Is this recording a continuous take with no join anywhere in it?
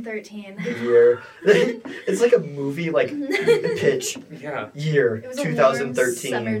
yes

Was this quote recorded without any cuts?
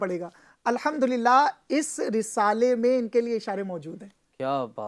yes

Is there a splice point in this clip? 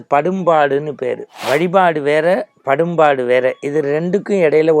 yes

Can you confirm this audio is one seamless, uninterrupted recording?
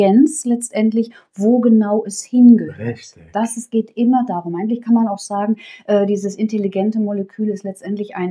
yes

